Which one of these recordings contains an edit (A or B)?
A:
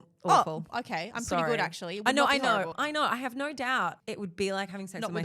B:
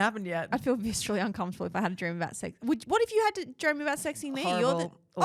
A